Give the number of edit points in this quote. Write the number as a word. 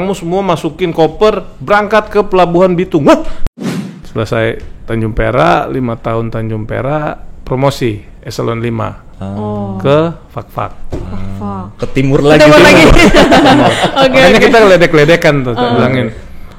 one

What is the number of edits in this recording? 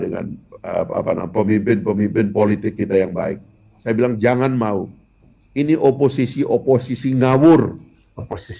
one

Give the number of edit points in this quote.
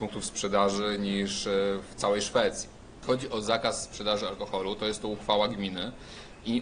one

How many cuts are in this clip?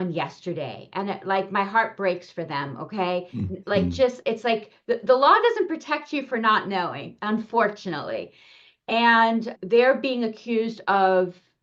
one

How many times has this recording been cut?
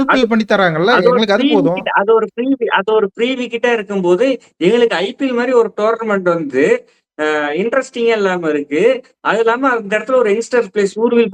zero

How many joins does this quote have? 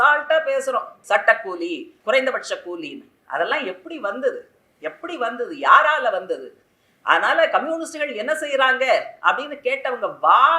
two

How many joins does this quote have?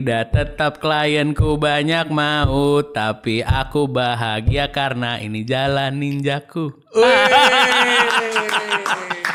zero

